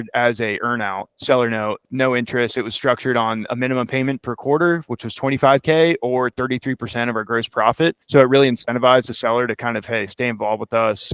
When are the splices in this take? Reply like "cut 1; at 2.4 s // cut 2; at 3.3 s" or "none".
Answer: cut 1; at 1.1 s // cut 2; at 1.9 s // cut 3; at 8.0 s